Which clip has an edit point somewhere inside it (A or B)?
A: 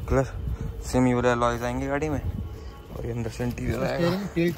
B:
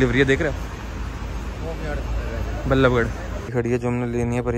B